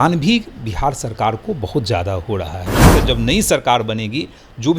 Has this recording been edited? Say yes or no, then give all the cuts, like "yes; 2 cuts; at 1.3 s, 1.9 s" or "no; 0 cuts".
yes; 1 cut; at 2.9 s